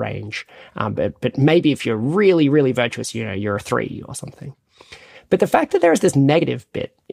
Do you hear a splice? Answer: no; 0 cuts

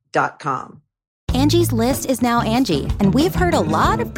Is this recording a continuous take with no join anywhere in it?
no; 1 cut; at 1.2 s

